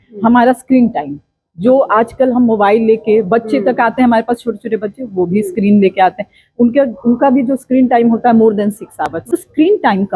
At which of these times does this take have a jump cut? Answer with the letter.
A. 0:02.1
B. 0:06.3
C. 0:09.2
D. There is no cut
C